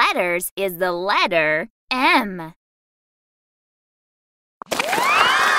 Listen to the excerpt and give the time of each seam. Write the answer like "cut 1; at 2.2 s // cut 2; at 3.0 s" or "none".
cut 1; at 1.7 s